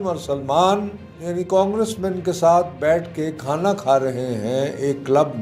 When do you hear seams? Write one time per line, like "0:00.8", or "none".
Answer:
0:01.1